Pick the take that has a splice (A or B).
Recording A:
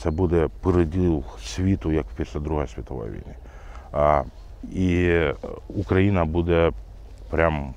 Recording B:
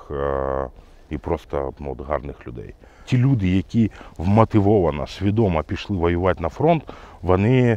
B